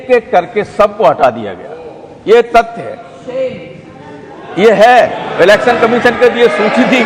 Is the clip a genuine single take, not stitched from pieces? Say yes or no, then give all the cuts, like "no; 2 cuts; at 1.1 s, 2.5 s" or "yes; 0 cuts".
yes; 0 cuts